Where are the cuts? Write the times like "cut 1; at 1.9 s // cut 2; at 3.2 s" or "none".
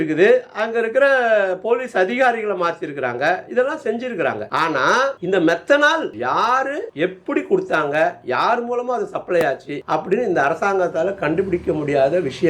none